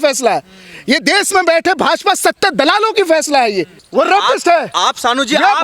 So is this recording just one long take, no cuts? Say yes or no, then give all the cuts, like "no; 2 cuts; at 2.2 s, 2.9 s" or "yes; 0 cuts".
no; 1 cut; at 3.8 s